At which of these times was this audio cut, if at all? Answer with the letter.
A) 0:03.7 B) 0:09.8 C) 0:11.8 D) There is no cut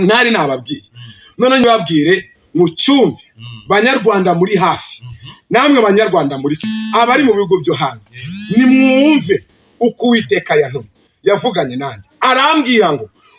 D